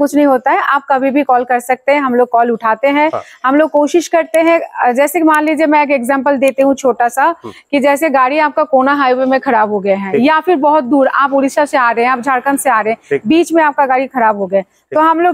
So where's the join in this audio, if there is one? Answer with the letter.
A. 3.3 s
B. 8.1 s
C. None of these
C